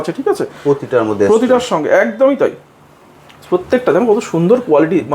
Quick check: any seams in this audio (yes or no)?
no